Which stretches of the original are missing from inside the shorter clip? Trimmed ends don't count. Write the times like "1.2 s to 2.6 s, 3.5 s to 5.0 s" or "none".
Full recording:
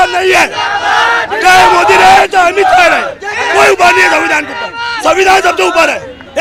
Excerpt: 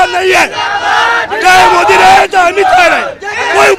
none